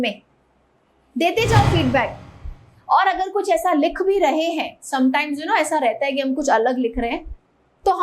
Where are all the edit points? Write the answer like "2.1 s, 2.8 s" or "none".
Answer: 2.2 s